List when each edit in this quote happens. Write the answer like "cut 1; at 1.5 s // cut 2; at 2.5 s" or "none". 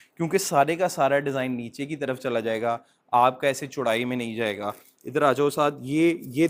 none